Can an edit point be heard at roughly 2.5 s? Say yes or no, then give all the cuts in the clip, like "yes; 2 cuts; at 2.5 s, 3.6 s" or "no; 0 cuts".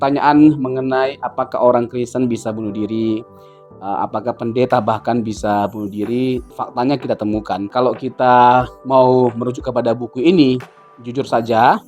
no; 2 cuts; at 6.5 s, 7.7 s